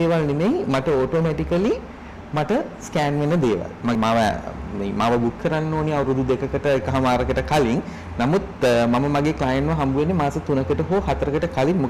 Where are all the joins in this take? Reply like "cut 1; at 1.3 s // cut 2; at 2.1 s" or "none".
cut 1; at 4.0 s

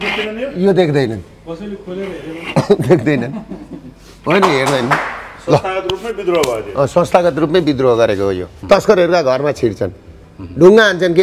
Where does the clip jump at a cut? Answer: cut 1; at 8.5 s

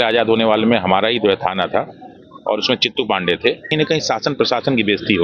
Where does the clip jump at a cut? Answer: cut 1; at 3.7 s

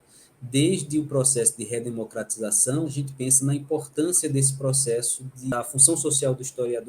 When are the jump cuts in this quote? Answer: cut 1; at 3.0 s // cut 2; at 5.5 s

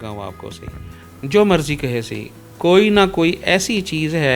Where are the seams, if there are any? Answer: none

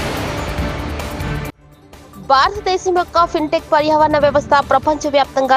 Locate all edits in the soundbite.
cut 1; at 2.2 s

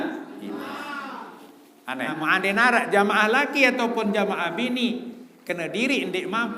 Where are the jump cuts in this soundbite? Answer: cut 1; at 2.1 s

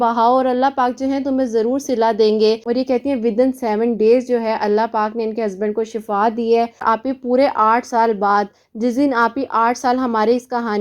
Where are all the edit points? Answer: cut 1; at 2.7 s // cut 2; at 6.8 s

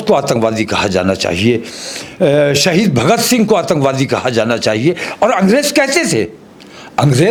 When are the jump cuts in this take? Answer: none

